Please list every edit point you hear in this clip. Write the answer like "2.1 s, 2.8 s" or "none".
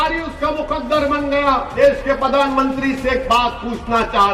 1.7 s